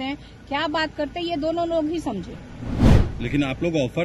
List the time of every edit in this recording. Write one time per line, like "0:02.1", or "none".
0:03.0